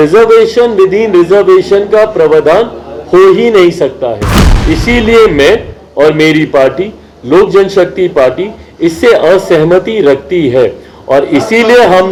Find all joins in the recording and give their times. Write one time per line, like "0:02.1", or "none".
none